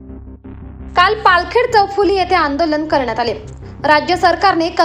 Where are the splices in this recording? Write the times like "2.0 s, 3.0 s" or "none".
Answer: none